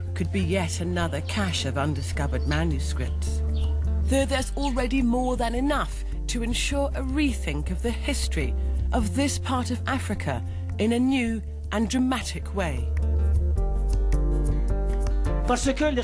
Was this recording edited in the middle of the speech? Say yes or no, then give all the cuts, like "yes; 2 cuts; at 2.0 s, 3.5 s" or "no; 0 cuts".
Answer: yes; 1 cut; at 3.3 s